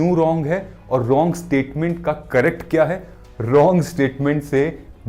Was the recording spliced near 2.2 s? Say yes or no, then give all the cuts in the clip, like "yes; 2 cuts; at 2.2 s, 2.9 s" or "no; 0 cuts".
no; 0 cuts